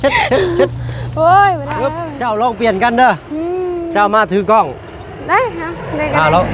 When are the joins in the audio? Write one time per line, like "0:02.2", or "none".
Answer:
0:02.1